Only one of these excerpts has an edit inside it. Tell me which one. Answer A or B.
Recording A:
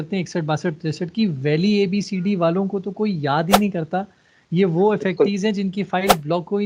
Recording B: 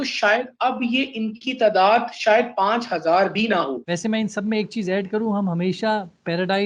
B